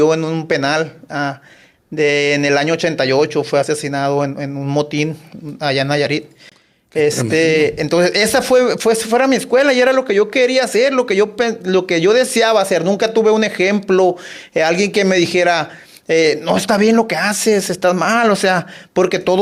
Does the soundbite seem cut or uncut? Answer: uncut